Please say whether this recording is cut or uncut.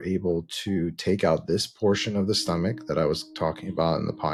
uncut